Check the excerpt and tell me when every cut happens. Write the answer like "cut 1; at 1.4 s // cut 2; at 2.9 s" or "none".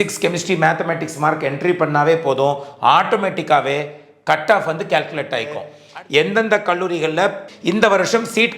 cut 1; at 5.8 s // cut 2; at 7.5 s

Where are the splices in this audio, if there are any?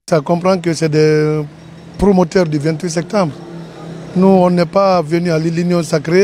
none

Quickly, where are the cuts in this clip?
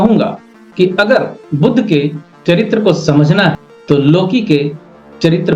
cut 1; at 3.7 s

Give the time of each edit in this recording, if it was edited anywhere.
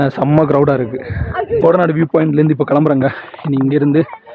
cut 1; at 1.6 s

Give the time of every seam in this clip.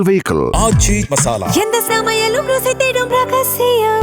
none

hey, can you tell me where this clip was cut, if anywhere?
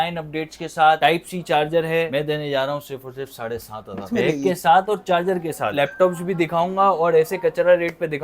cut 1; at 2.1 s // cut 2; at 4.1 s // cut 3; at 5.7 s

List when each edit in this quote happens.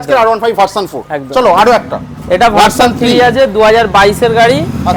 none

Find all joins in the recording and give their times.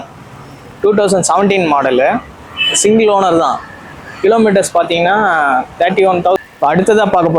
cut 1; at 6.4 s

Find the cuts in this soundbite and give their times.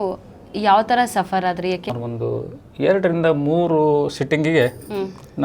cut 1; at 1.9 s

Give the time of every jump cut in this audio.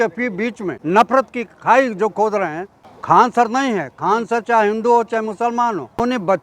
cut 1; at 1.1 s // cut 2; at 3.2 s // cut 3; at 5.4 s

